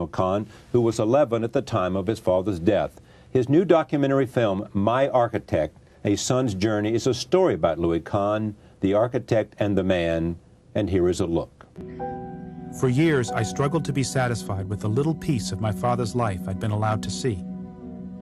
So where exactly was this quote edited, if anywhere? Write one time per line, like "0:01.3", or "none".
0:15.3